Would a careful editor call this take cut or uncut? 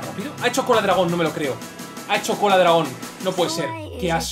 uncut